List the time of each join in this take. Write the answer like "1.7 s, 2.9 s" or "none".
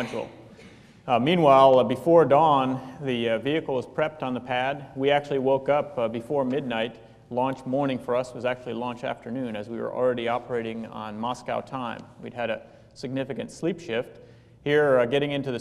13.9 s